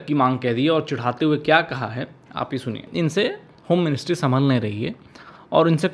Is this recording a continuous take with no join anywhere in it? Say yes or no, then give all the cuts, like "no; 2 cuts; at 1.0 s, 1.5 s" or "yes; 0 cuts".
no; 1 cut; at 2.9 s